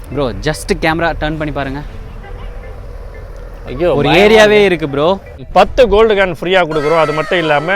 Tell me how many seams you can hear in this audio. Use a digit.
1